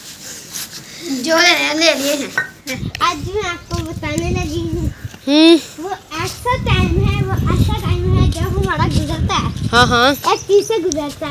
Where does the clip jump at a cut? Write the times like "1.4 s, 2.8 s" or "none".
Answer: 2.7 s